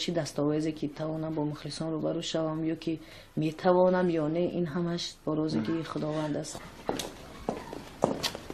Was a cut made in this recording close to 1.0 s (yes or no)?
no